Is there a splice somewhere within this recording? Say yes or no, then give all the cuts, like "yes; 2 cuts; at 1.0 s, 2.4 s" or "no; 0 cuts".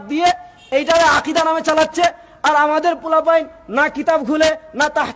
no; 0 cuts